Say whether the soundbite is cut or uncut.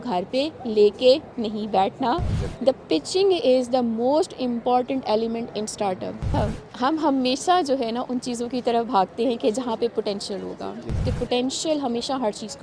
cut